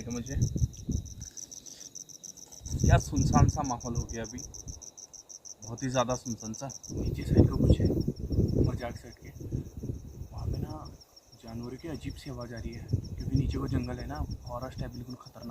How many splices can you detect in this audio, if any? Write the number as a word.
two